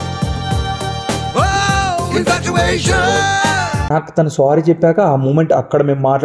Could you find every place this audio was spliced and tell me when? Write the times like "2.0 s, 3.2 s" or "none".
3.8 s